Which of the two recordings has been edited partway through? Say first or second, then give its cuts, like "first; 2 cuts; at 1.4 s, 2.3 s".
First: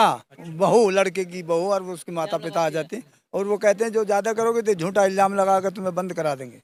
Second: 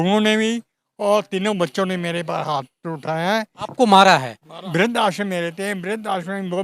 second; 2 cuts; at 3.6 s, 4.6 s